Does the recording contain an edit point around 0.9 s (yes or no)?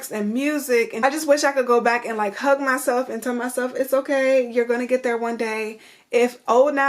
yes